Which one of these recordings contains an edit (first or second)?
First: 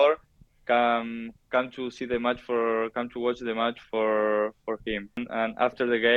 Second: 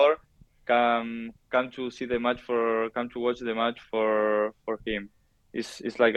first